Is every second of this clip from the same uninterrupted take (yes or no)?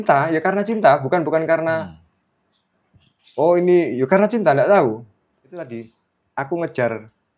no